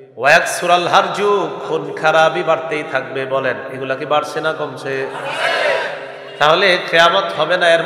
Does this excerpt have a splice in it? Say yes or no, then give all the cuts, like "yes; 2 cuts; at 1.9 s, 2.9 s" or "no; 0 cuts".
yes; 1 cut; at 6.2 s